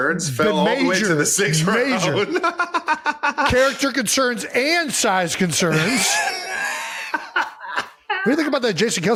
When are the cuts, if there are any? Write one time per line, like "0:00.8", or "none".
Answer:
none